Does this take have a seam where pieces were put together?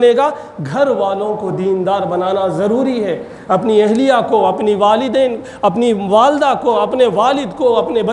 no; 0 cuts

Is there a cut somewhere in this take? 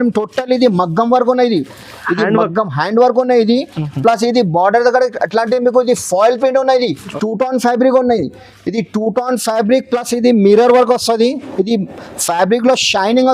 yes; 1 cut; at 7.2 s

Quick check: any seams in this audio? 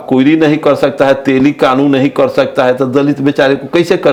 no; 0 cuts

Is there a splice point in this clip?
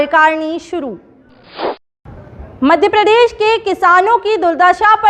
yes; 1 cut; at 1.8 s

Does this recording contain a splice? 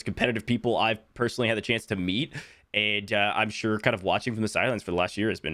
no; 0 cuts

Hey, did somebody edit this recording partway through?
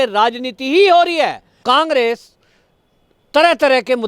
yes; 1 cut; at 1.5 s

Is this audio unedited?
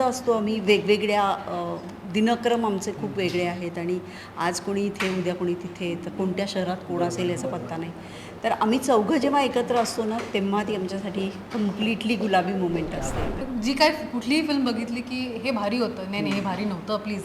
no; 1 cut; at 13.4 s

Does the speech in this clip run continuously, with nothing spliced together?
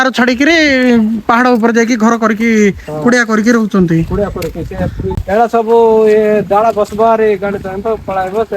no; 1 cut; at 5.1 s

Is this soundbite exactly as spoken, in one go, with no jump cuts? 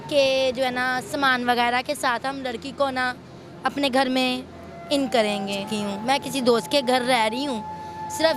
no; 1 cut; at 5.6 s

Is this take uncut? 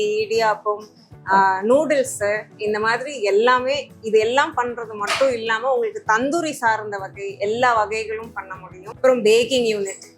no; 1 cut; at 9.0 s

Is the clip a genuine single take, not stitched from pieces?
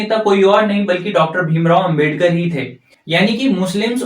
no; 1 cut; at 2.9 s

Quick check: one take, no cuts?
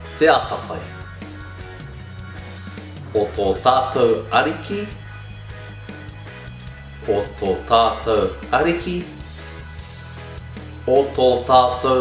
no; 2 cuts; at 5.1 s, 7.0 s

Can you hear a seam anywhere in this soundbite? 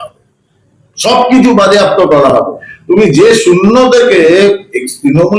no; 0 cuts

